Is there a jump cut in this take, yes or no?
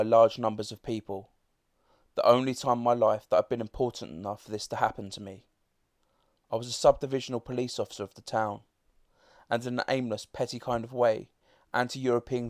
no